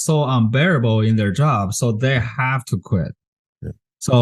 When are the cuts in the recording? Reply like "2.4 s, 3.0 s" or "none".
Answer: none